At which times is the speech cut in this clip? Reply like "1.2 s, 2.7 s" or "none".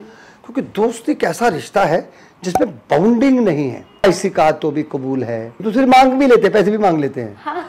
4.0 s, 5.6 s